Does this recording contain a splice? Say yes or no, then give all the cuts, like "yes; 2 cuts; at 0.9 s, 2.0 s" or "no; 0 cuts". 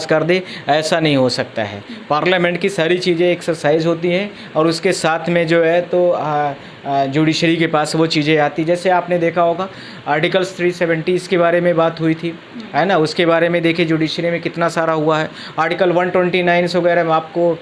no; 0 cuts